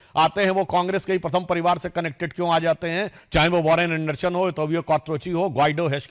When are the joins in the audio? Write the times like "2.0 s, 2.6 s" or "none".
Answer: none

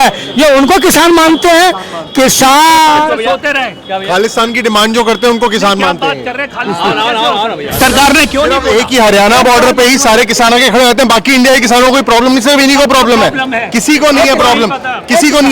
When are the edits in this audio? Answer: 7.8 s

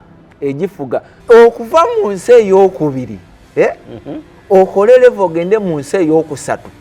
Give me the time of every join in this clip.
1.1 s

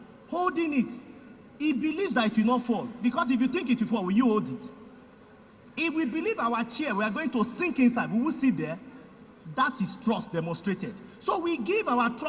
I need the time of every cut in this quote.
none

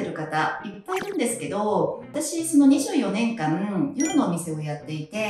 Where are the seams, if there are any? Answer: 2.1 s

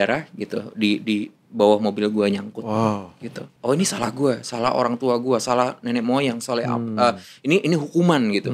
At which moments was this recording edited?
3.5 s

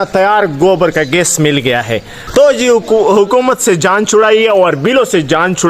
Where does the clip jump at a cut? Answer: 2.1 s

